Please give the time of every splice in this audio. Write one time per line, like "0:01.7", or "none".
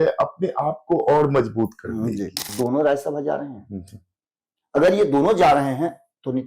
0:02.4